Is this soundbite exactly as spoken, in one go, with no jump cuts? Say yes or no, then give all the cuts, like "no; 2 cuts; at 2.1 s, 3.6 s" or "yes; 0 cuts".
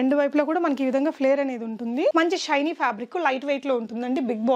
no; 1 cut; at 2.1 s